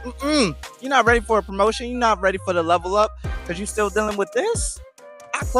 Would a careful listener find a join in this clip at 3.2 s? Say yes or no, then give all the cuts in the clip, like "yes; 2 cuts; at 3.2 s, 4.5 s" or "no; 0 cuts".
no; 0 cuts